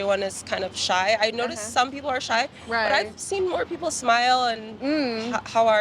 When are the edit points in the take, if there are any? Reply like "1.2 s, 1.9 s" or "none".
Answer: none